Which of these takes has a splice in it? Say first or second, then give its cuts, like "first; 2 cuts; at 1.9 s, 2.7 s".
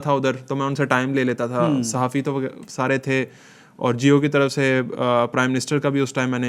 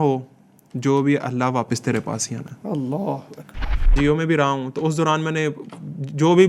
second; 1 cut; at 3.9 s